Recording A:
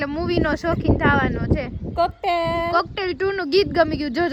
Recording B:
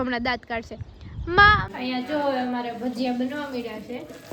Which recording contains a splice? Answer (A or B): B